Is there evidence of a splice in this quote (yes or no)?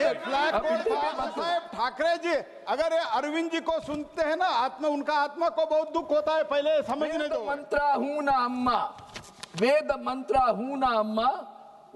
yes